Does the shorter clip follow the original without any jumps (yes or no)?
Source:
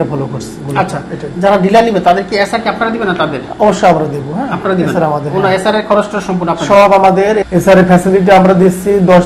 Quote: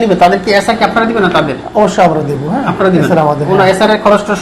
yes